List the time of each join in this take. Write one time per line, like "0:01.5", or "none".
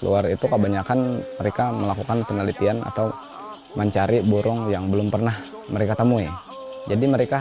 none